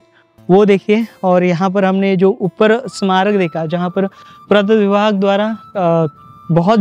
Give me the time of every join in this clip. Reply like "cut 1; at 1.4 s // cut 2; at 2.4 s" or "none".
none